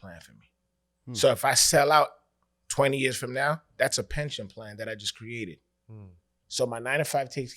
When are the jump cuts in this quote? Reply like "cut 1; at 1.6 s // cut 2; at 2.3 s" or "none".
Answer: cut 1; at 6.4 s

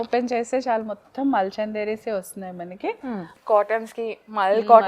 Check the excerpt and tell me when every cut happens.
cut 1; at 3.4 s

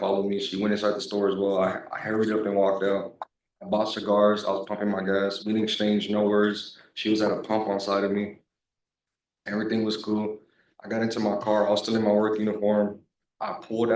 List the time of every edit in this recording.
none

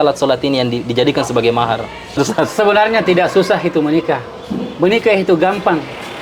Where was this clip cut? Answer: cut 1; at 2.2 s

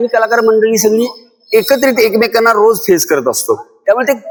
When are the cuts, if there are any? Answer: none

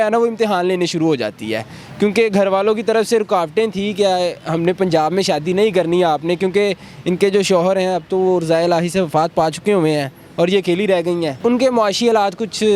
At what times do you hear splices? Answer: none

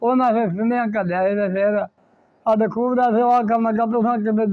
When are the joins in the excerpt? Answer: none

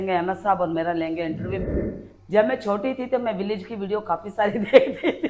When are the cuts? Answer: cut 1; at 1.6 s

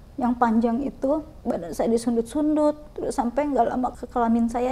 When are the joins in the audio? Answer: cut 1; at 1.3 s // cut 2; at 3.9 s

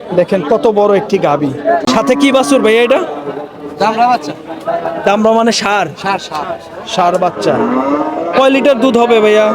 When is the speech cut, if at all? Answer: cut 1; at 1.8 s

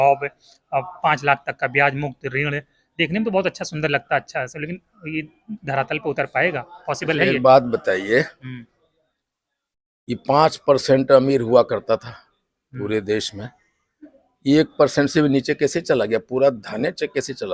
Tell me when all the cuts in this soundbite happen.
none

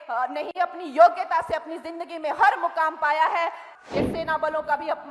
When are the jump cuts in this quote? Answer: cut 1; at 3.6 s

